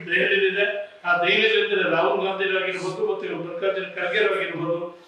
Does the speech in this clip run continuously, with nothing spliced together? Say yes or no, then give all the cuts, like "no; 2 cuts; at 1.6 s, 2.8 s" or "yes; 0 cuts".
yes; 0 cuts